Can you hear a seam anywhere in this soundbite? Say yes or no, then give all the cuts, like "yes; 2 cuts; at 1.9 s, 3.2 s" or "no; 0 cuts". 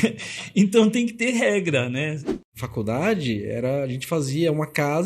yes; 1 cut; at 2.3 s